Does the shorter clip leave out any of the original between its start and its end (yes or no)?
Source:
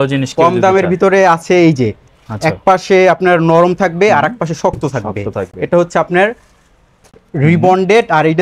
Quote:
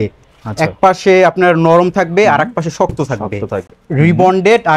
yes